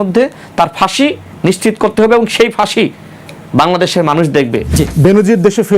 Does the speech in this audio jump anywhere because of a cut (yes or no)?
yes